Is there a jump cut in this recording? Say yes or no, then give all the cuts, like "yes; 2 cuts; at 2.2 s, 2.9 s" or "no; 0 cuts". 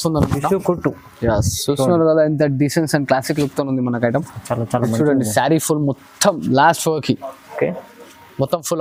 no; 0 cuts